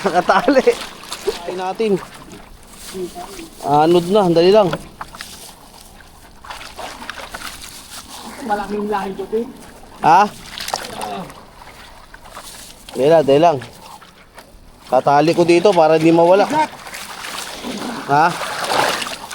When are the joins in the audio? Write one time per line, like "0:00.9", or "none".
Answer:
0:01.6